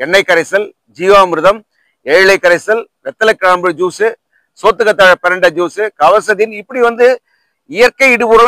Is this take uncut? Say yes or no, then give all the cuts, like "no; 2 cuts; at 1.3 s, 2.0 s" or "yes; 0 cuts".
yes; 0 cuts